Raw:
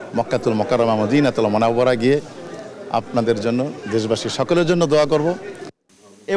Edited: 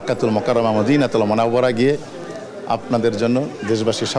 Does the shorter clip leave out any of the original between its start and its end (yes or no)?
no